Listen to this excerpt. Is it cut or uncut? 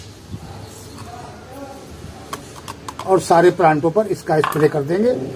uncut